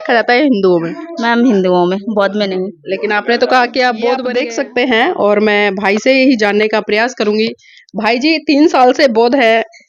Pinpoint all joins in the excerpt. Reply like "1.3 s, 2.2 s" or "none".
4.3 s